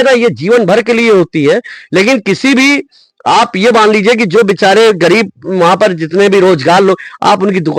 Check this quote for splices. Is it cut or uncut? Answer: uncut